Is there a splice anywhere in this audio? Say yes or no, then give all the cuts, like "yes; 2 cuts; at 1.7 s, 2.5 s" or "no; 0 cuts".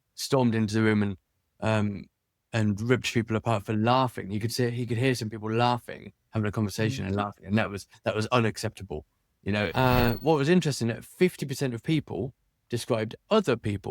yes; 1 cut; at 9.7 s